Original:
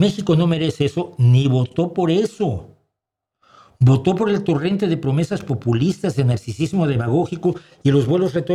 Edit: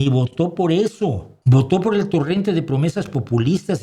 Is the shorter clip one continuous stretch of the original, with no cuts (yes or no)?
no